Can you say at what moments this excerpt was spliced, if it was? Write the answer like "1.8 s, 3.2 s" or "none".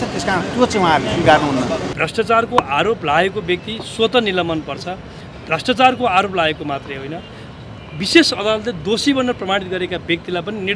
1.9 s